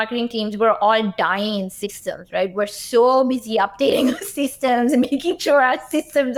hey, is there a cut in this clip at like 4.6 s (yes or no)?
no